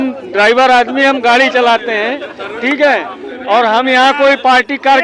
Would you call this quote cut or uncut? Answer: uncut